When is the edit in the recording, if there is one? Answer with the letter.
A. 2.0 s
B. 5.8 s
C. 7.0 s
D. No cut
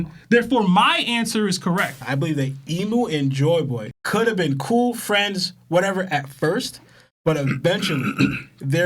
A